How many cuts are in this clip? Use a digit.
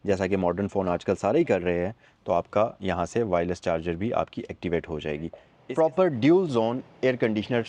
1